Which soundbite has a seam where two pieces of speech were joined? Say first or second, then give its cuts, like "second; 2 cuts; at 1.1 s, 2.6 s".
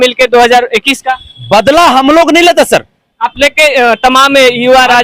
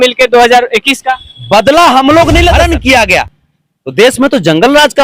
second; 1 cut; at 2.5 s